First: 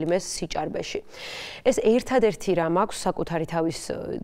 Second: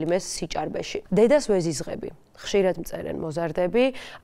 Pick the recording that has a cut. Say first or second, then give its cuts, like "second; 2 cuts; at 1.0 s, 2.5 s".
second; 1 cut; at 1.0 s